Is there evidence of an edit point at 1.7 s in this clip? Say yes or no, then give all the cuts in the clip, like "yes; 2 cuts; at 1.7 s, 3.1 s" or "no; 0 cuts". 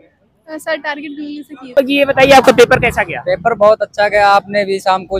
yes; 1 cut; at 1.7 s